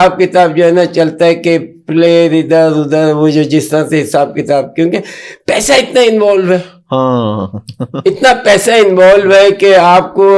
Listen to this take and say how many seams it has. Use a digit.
0